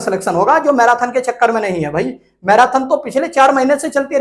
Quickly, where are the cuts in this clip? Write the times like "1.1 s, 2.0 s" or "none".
none